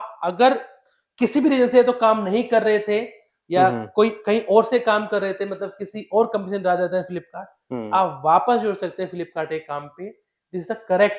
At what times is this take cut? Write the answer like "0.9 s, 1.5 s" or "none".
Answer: none